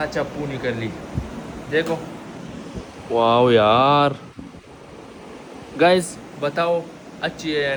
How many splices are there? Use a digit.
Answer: 0